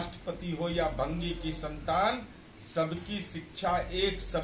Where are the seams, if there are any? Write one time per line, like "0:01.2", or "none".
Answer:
none